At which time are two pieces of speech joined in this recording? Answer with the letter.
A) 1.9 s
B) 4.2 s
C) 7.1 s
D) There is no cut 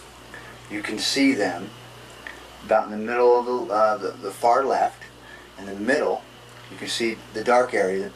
B